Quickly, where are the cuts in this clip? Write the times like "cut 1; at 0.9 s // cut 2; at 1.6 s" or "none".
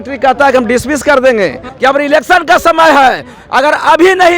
cut 1; at 1.7 s